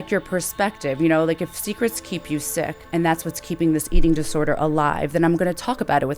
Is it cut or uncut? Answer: cut